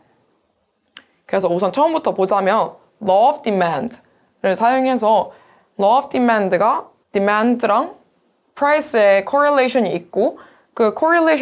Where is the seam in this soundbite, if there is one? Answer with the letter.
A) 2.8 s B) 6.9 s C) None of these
B